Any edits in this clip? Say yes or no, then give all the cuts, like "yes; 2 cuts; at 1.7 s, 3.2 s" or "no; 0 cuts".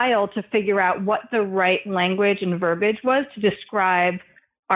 no; 0 cuts